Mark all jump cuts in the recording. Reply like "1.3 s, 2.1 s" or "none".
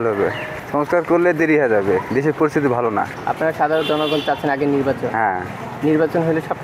none

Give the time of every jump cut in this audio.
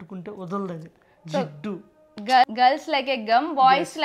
2.5 s

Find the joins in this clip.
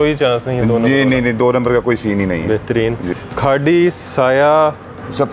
3.1 s

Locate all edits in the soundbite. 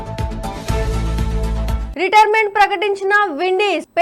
1.8 s

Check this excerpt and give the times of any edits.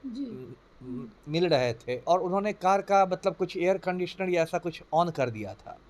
2.0 s

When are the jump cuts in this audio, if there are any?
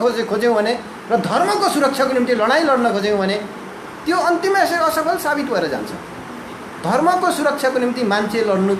none

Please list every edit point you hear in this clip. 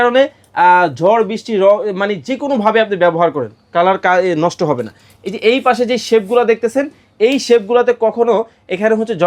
none

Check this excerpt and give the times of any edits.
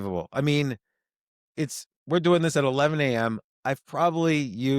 none

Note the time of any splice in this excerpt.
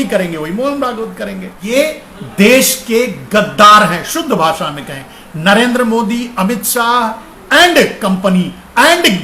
1.6 s

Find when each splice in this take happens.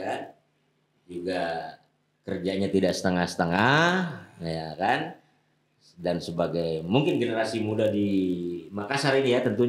none

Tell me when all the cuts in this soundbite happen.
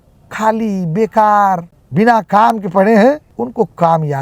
1.8 s, 3.3 s

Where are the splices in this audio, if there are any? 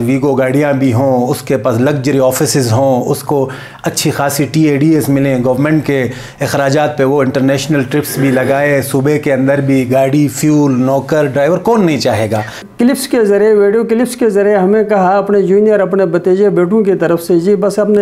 12.5 s

